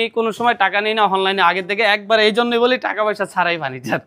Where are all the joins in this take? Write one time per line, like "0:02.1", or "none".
none